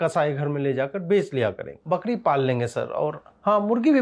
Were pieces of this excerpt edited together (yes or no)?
yes